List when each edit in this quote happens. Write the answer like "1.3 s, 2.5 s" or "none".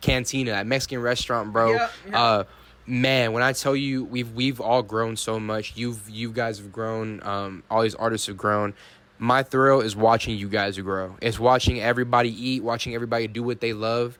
none

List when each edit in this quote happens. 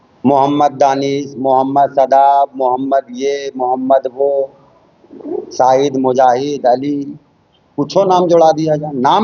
none

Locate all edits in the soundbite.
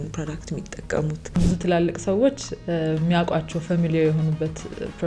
1.4 s

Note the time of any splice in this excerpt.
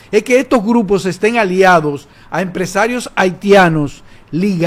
none

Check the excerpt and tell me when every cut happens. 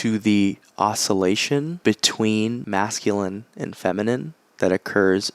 1.7 s, 2.6 s

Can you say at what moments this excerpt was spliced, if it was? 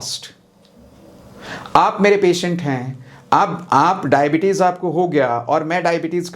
none

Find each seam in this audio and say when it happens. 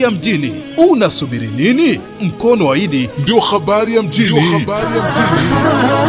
none

